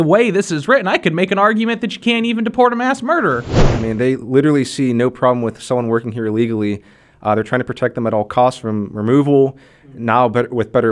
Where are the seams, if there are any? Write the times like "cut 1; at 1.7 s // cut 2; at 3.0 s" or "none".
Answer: cut 1; at 3.5 s